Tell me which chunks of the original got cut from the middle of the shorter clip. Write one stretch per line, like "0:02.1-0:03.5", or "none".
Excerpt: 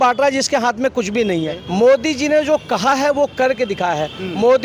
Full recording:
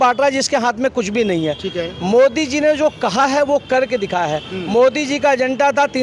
0:01.6-0:01.9